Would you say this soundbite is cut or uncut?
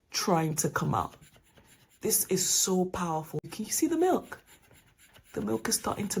cut